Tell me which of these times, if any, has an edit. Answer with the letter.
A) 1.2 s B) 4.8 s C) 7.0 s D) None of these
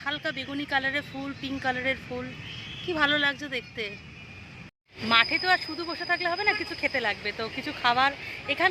B